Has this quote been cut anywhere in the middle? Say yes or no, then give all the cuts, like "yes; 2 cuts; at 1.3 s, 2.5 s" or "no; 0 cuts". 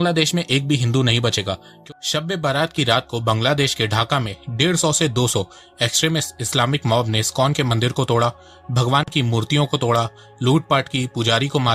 yes; 1 cut; at 1.8 s